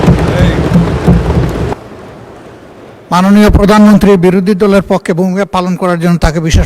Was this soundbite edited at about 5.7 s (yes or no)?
no